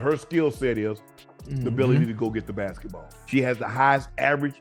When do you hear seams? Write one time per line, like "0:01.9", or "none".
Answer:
0:03.2